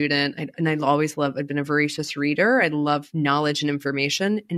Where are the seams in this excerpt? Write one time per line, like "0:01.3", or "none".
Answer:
none